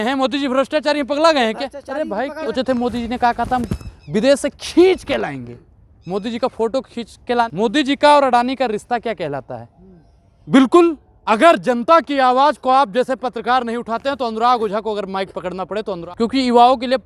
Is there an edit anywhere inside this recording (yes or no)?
yes